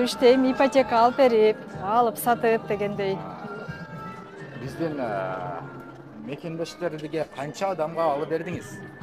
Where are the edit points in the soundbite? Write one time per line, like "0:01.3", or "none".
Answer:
none